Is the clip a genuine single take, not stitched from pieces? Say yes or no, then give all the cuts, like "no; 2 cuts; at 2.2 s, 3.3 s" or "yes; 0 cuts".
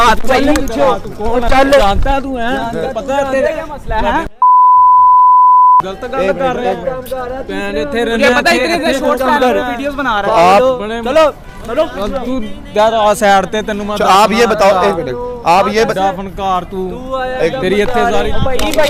yes; 0 cuts